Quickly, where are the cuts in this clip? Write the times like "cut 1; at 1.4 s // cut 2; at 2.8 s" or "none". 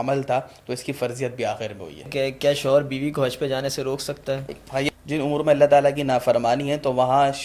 cut 1; at 2.1 s // cut 2; at 4.9 s

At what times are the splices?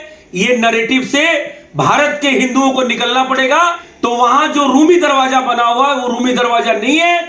cut 1; at 3.9 s

